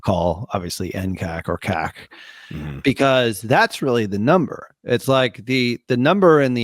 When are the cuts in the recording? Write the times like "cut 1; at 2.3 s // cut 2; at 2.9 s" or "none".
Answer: none

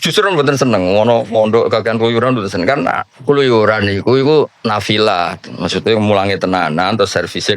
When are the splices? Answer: cut 1; at 3.1 s

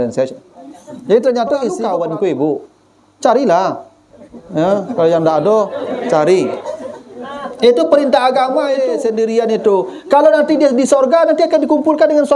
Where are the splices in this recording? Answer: cut 1; at 1.8 s // cut 2; at 8.8 s

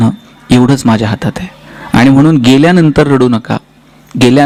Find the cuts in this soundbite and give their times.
none

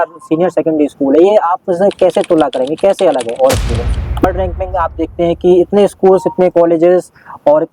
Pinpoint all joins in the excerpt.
cut 1; at 4.2 s

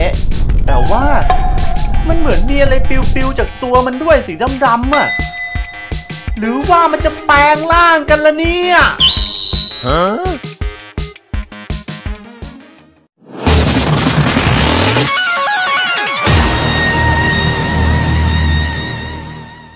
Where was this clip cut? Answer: none

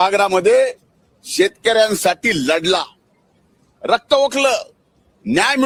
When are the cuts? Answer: none

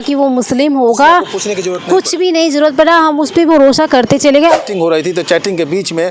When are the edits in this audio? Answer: cut 1; at 4.4 s

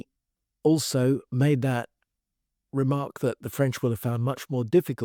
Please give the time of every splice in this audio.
cut 1; at 1.3 s

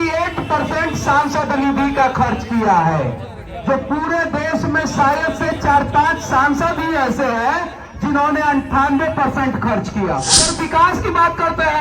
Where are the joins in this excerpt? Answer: cut 1; at 10.5 s

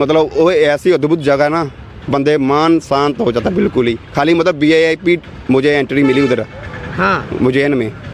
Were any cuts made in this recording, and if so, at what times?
none

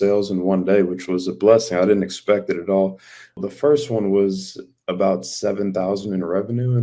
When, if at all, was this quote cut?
cut 1; at 3.4 s

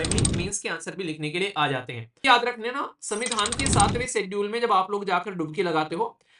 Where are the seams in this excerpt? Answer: cut 1; at 2.2 s

